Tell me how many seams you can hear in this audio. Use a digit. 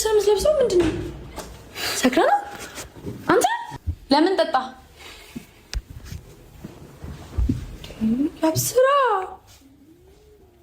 1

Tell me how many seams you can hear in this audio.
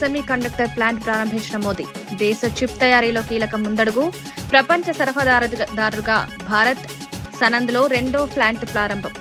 0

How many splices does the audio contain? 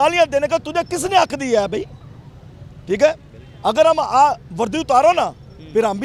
0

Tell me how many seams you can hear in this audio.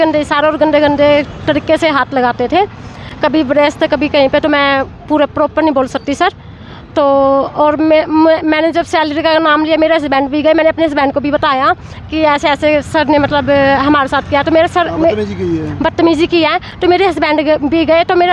0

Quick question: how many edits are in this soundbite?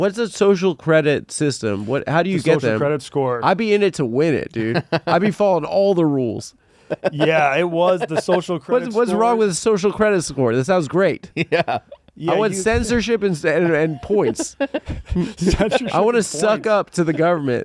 0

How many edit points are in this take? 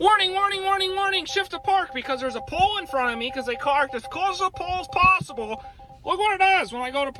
0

